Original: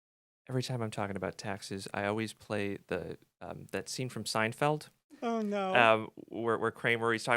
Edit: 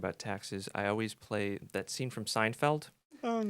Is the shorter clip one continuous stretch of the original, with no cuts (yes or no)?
no